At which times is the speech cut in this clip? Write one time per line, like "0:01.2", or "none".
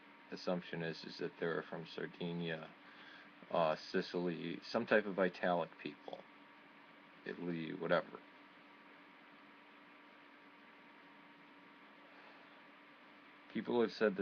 0:10.0